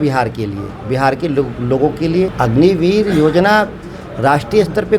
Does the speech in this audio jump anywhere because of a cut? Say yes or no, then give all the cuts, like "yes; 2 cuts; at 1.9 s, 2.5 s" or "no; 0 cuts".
yes; 1 cut; at 2.3 s